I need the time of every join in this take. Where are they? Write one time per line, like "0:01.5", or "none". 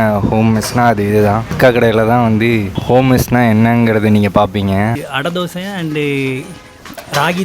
0:01.5
0:02.7
0:05.0